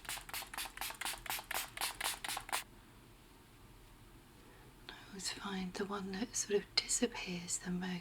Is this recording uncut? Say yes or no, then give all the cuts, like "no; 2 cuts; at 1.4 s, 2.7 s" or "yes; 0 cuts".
no; 1 cut; at 2.7 s